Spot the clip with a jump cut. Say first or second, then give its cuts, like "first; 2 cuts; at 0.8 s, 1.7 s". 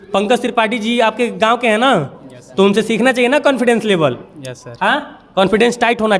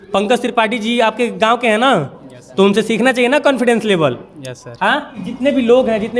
second; 1 cut; at 5.2 s